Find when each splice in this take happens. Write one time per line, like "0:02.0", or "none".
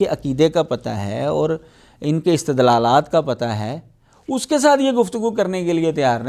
none